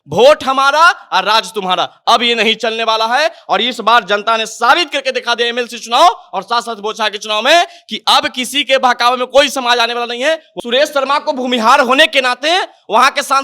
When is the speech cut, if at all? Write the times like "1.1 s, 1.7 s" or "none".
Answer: 10.5 s

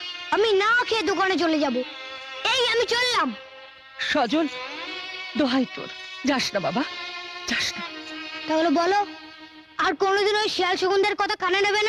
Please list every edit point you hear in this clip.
none

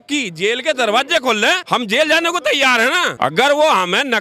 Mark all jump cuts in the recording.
1.6 s, 3.1 s

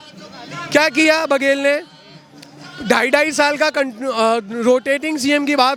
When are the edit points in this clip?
none

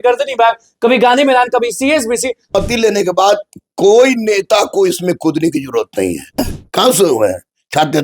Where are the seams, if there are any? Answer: 2.5 s, 6.4 s

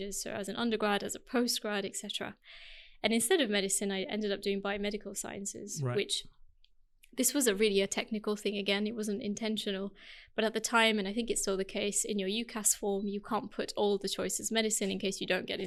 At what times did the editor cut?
none

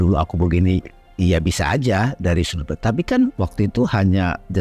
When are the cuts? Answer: 3.3 s

